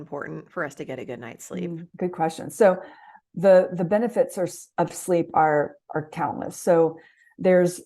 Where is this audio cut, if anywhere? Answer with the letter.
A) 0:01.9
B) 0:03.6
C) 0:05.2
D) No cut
A